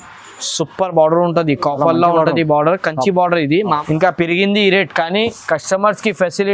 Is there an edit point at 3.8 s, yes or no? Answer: yes